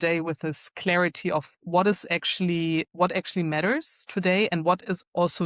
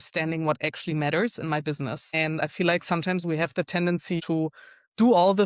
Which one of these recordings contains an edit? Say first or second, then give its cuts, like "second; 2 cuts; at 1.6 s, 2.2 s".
second; 2 cuts; at 2.0 s, 4.2 s